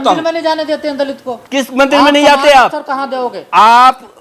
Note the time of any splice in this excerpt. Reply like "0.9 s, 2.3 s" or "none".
1.3 s